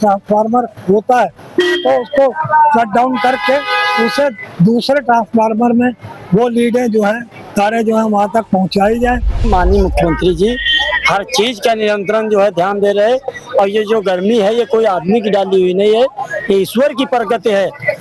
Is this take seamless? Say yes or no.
no